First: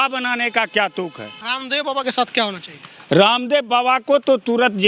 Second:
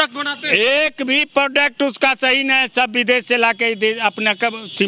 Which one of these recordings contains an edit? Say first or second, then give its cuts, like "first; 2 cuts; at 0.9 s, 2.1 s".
first; 1 cut; at 1.5 s